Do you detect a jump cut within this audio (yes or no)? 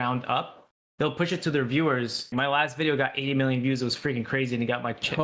yes